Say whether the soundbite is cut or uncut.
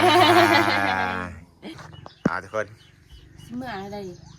cut